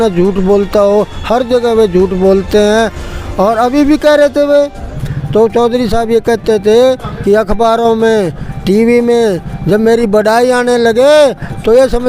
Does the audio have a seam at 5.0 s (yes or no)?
yes